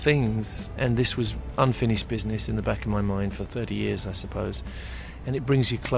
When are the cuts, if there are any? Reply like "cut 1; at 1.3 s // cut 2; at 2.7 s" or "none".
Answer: cut 1; at 5.1 s